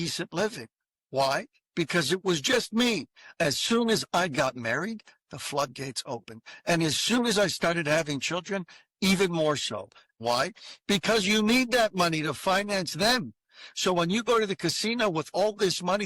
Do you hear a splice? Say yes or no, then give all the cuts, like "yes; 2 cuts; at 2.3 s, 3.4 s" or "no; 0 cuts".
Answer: yes; 2 cuts; at 3.3 s, 10.1 s